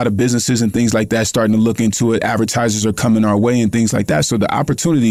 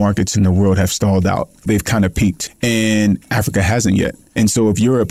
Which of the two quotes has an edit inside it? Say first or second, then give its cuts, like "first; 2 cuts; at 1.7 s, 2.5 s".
second; 3 cuts; at 1.6 s, 2.4 s, 4.3 s